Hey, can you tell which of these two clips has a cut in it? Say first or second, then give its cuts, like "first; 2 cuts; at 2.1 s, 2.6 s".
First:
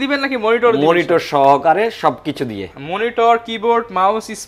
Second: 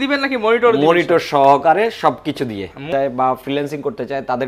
second; 1 cut; at 2.8 s